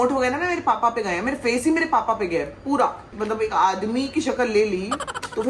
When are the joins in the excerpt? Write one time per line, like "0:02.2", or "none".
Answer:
0:03.1